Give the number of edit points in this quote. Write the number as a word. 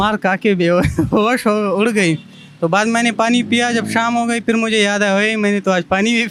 zero